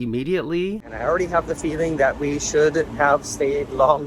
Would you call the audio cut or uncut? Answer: uncut